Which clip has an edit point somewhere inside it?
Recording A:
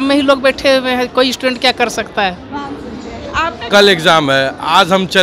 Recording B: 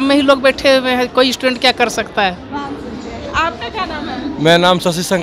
A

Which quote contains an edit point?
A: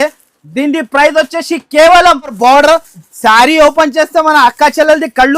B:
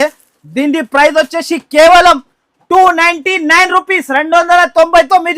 A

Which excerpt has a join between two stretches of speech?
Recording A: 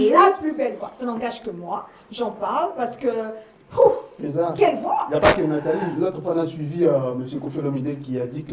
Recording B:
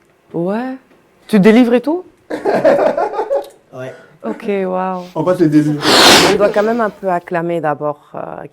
B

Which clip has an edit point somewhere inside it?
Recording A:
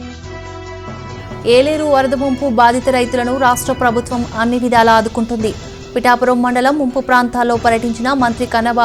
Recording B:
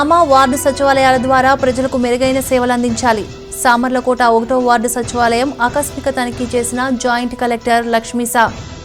A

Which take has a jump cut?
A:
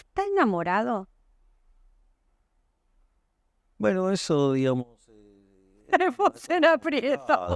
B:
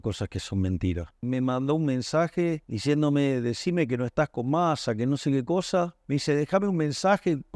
B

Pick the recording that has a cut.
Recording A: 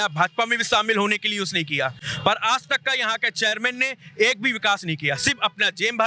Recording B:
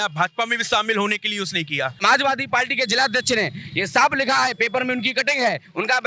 B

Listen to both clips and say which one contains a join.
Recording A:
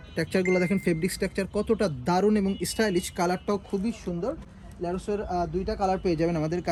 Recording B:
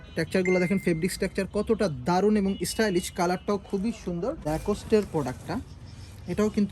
B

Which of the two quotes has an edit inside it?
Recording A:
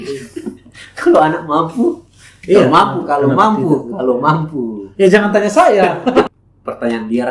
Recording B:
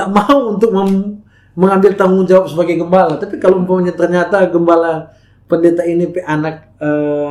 A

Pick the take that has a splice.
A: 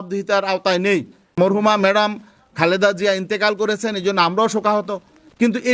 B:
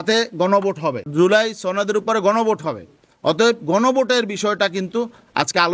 A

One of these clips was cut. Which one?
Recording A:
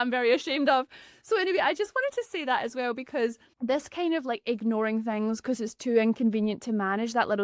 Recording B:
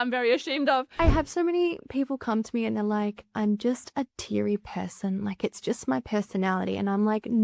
B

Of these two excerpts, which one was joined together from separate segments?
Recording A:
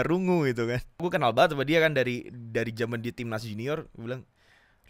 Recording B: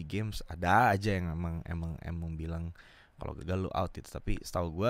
A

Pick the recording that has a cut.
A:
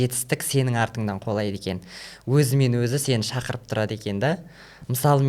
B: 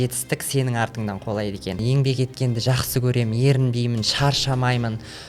B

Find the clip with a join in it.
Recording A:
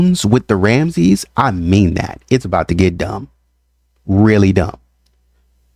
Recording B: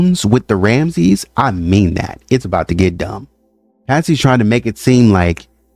B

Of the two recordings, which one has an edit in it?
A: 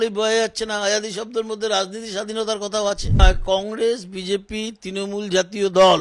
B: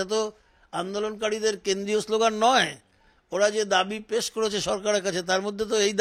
A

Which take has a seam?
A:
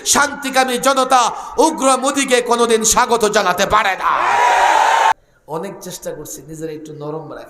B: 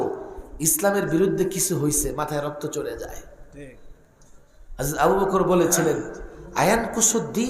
A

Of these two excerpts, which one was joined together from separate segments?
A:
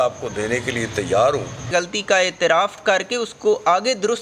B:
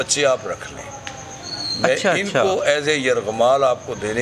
A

